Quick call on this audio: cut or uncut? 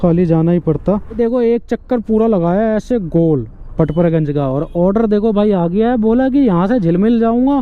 cut